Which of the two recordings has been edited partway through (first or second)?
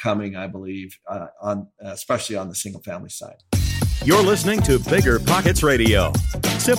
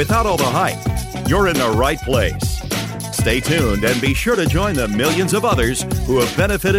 first